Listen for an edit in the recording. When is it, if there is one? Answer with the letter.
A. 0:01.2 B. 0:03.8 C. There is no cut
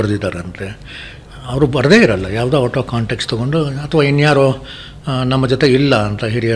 C